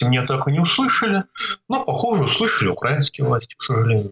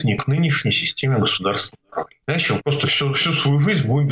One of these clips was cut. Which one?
second; 1 cut; at 2.1 s

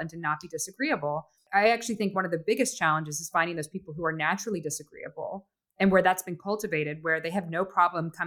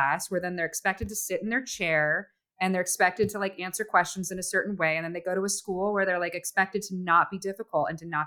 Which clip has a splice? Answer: first; 1 cut; at 1.3 s

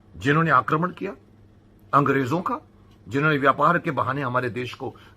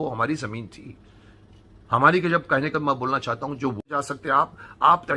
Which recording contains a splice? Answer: second; 1 cut; at 3.8 s

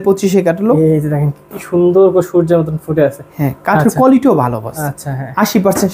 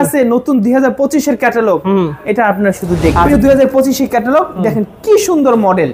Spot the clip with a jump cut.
second; 1 cut; at 3.3 s

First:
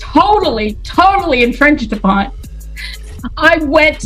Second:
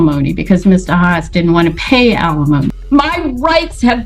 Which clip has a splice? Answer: second; 1 cut; at 2.8 s

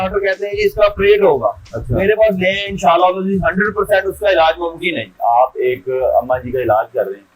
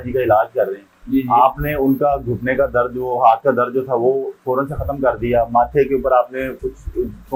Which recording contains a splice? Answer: first; 1 cut; at 5.1 s

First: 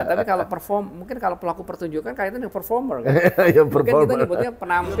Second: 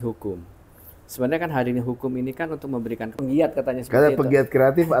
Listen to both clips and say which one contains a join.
second; 1 cut; at 3.1 s

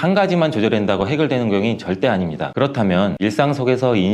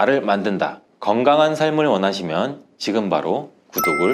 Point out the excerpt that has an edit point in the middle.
first; 1 cut; at 2.5 s

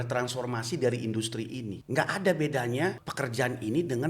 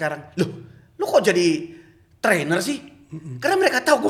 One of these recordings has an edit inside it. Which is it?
first; 2 cuts; at 1.8 s, 3.1 s

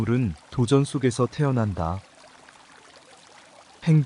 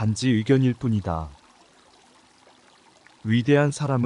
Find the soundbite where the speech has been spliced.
second; 2 cuts; at 1.3 s, 3.1 s

